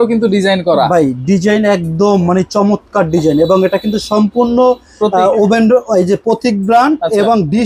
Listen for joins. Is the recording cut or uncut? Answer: uncut